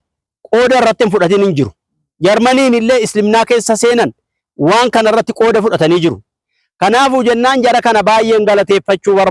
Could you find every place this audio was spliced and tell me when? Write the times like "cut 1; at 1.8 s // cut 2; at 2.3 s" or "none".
none